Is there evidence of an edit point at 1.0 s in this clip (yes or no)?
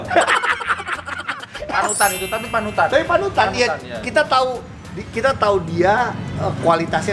no